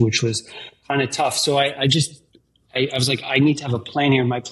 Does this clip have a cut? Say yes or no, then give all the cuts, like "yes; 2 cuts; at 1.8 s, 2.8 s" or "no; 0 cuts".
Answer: no; 0 cuts